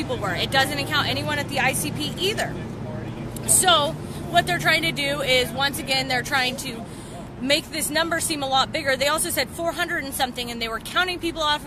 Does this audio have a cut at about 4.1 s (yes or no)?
yes